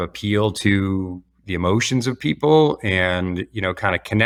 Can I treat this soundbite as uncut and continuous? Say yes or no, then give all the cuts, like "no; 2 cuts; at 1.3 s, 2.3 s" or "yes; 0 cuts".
yes; 0 cuts